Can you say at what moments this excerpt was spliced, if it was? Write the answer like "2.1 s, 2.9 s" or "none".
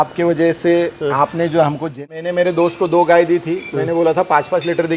1.9 s